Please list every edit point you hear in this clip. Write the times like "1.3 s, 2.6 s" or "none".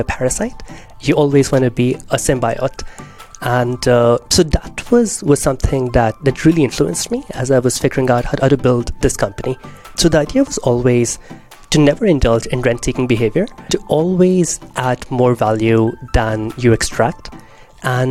9.9 s, 13.7 s